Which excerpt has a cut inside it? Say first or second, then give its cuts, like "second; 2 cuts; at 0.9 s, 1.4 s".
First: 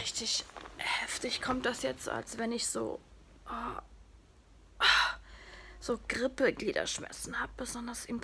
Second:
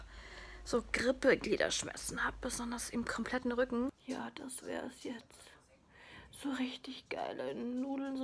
second; 1 cut; at 4.0 s